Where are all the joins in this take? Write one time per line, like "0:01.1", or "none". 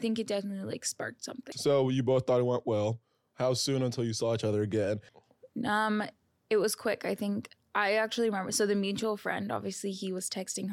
0:01.5
0:05.1

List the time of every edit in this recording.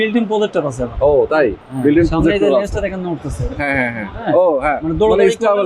none

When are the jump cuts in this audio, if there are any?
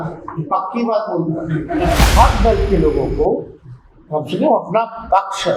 0:02.0

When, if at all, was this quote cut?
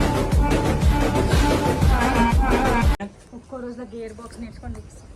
0:03.0

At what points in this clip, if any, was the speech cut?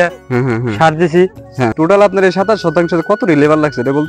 0:01.7

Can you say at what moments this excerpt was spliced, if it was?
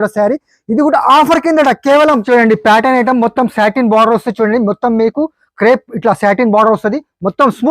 0:02.2

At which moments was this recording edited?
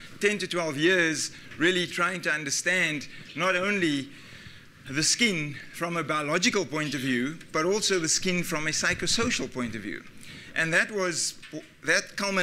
0:05.2

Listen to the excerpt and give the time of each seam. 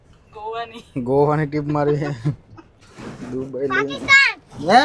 0:02.8

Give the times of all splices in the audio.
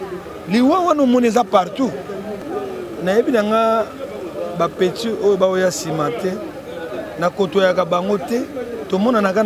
0:02.4

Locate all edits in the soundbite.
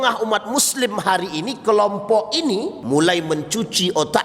0:02.8

